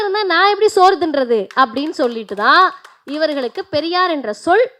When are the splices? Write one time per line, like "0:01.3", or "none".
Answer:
none